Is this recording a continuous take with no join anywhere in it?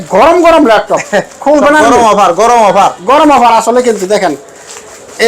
yes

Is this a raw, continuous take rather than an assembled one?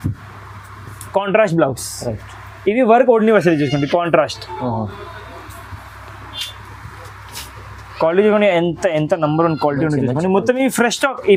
yes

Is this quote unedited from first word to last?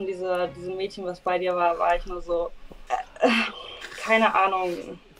yes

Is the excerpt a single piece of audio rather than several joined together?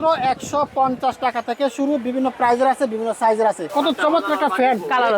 no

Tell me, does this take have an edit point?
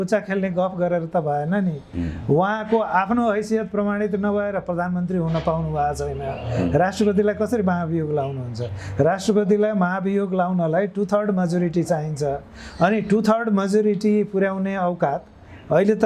no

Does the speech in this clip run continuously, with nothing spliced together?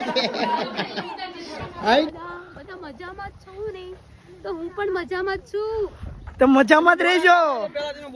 no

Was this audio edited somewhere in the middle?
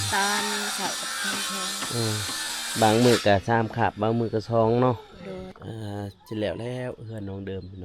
yes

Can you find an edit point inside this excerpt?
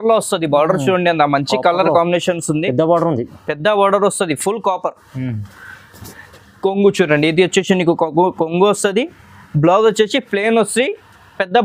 no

